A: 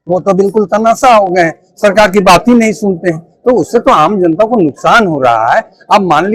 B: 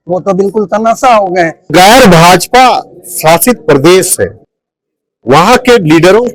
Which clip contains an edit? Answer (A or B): B